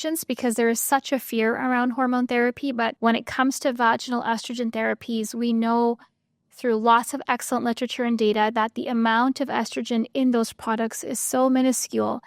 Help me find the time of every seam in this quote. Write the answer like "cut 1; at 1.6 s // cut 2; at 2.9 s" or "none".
cut 1; at 2.9 s